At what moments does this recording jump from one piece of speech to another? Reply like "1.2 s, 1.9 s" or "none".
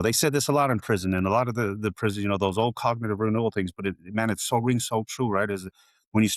none